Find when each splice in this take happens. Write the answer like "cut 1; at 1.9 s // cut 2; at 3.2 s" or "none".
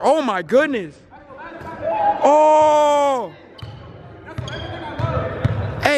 none